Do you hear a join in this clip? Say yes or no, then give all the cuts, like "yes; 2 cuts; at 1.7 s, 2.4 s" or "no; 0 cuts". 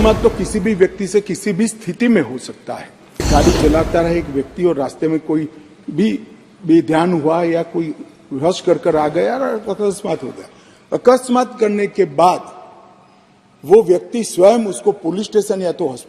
yes; 1 cut; at 3.3 s